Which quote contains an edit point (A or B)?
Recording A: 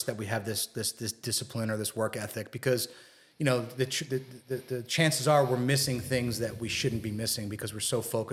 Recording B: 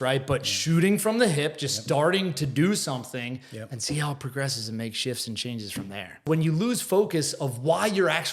B